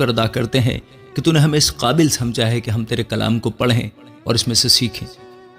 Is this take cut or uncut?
uncut